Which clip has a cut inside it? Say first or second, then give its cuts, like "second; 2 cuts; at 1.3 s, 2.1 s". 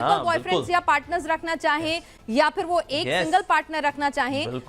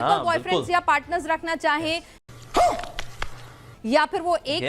first; 1 cut; at 2.1 s